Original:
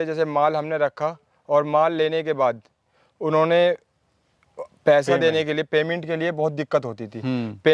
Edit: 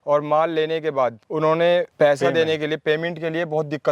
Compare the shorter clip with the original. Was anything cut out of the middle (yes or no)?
yes